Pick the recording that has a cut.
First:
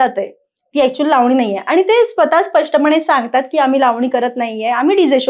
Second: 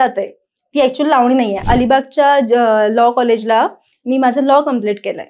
second; 1 cut; at 1.6 s

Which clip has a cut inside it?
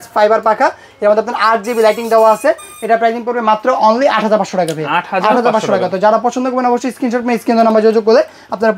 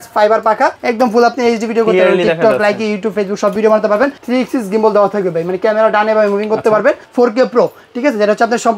second; 3 cuts; at 0.8 s, 4.2 s, 7.0 s

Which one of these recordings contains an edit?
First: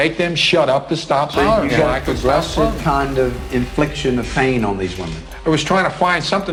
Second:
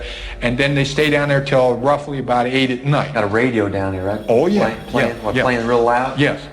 second; 1 cut; at 3.1 s

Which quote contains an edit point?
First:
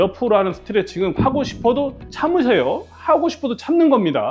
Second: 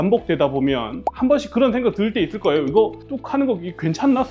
second; 1 cut; at 1.0 s

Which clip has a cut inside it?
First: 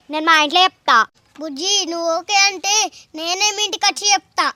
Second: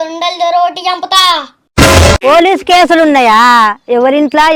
second; 1 cut; at 2.2 s

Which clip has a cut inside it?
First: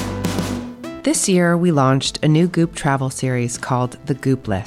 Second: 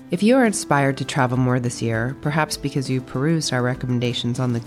first; 1 cut; at 1.0 s

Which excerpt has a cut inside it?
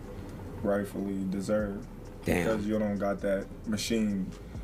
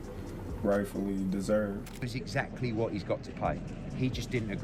second; 1 cut; at 2.1 s

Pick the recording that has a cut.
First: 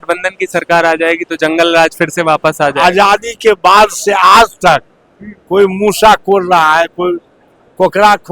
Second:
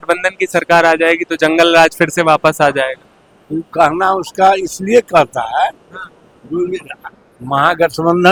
first; 1 cut; at 2.8 s

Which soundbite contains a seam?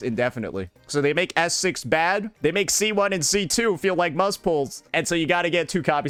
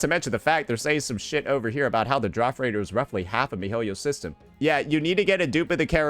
second; 1 cut; at 4.5 s

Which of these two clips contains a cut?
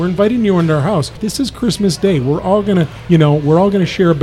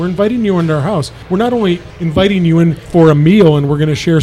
first; 1 cut; at 1.2 s

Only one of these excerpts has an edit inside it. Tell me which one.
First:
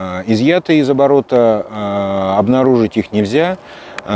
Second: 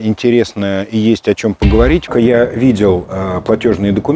second; 1 cut; at 2.1 s

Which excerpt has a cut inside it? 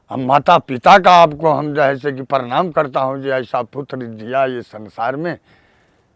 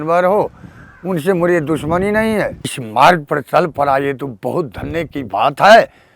second; 1 cut; at 2.7 s

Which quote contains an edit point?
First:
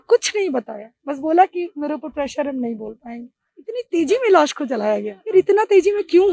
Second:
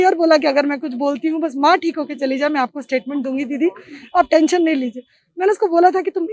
first; 2 cuts; at 3.8 s, 5.3 s

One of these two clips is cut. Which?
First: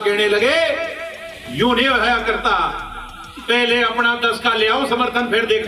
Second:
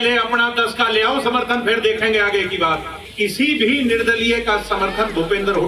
second; 1 cut; at 3.0 s

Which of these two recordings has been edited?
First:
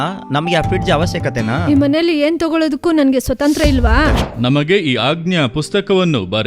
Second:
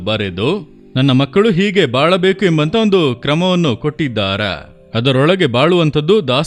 first; 1 cut; at 4.2 s

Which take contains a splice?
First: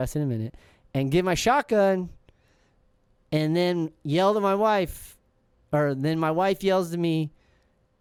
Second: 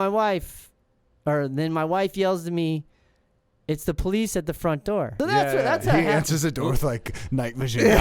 second; 1 cut; at 5.1 s

